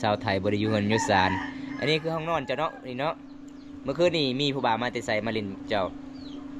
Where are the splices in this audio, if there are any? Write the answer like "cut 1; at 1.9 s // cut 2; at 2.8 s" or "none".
none